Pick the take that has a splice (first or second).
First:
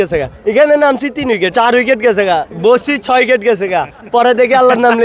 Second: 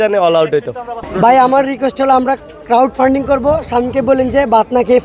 second